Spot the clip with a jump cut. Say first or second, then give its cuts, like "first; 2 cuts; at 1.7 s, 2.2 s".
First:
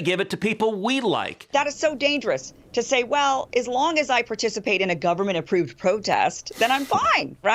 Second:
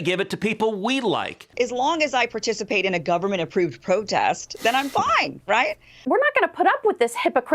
second; 2 cuts; at 1.5 s, 6.0 s